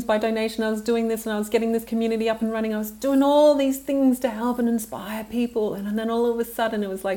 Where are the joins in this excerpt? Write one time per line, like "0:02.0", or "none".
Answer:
none